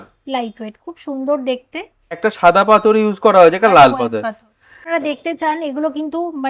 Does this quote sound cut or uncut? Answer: cut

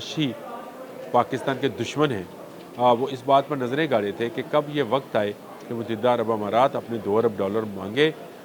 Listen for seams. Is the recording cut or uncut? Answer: uncut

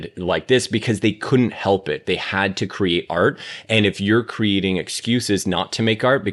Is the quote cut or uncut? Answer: uncut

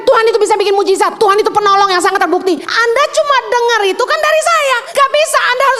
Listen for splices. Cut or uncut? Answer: cut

